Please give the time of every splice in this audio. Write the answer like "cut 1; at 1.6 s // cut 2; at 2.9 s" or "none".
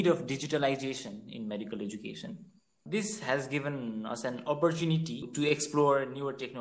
cut 1; at 2.8 s